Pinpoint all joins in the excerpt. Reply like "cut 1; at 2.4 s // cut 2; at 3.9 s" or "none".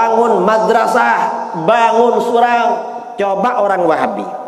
cut 1; at 3.0 s